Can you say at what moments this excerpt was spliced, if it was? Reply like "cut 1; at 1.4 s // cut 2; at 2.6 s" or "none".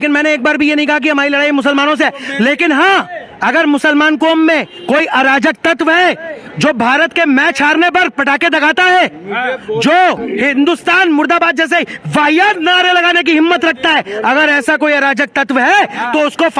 none